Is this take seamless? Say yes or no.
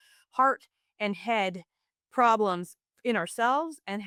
yes